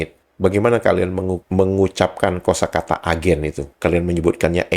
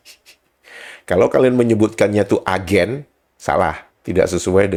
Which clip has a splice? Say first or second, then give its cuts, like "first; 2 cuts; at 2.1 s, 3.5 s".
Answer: first; 1 cut; at 3.7 s